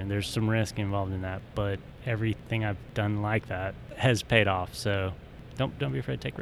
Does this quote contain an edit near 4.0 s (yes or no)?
yes